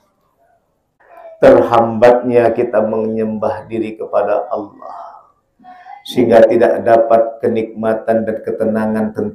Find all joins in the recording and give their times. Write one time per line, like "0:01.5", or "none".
0:01.0